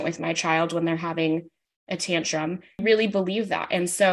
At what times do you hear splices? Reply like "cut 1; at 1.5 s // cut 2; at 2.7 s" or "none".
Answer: cut 1; at 2.7 s

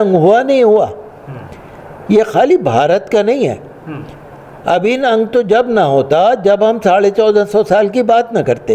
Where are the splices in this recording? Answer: none

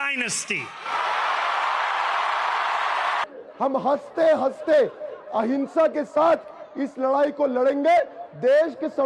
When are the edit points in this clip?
cut 1; at 2.0 s

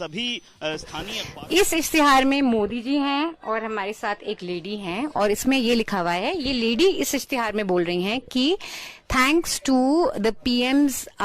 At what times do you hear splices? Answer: cut 1; at 1.2 s

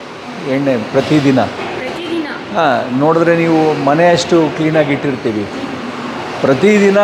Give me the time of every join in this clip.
none

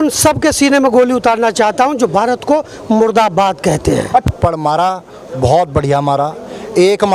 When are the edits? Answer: cut 1; at 4.2 s

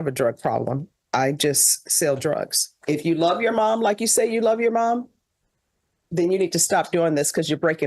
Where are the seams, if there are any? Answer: cut 1; at 2.8 s

